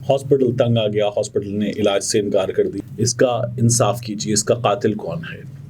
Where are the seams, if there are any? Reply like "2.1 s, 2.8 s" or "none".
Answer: 2.8 s